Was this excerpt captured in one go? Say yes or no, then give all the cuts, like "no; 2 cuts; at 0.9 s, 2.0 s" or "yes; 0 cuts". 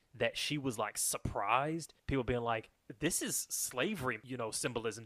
no; 3 cuts; at 1.9 s, 2.8 s, 4.2 s